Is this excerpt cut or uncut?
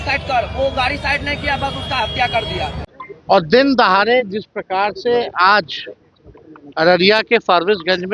cut